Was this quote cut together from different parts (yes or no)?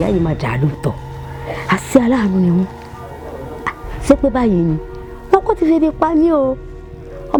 no